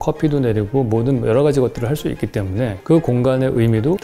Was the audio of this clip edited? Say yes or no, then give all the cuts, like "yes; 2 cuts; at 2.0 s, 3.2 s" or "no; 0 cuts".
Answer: no; 0 cuts